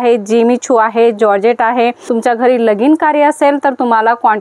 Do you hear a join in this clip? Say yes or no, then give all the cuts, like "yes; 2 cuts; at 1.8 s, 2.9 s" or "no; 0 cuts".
yes; 1 cut; at 2.0 s